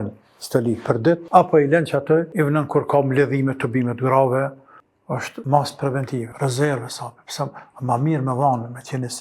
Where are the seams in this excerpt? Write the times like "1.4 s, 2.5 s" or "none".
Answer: 1.2 s, 2.3 s, 4.9 s, 6.3 s